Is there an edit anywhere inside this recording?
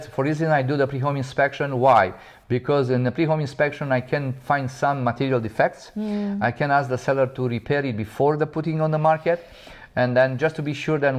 no; 0 cuts

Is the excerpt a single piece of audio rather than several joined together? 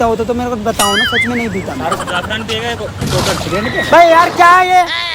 yes; 0 cuts

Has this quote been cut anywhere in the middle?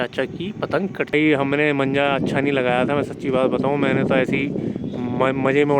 yes; 1 cut; at 1.1 s

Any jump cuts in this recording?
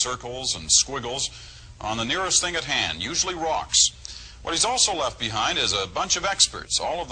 no; 0 cuts

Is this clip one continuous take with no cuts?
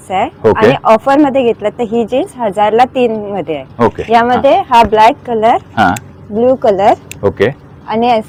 yes; 0 cuts

